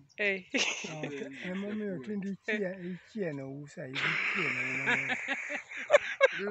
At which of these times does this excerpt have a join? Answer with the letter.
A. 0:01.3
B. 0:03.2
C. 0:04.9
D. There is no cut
A